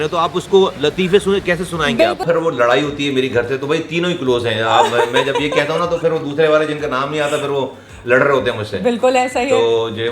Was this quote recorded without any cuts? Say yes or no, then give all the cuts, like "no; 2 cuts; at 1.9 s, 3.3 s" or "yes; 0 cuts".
no; 1 cut; at 2.2 s